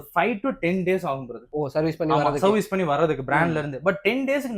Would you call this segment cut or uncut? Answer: uncut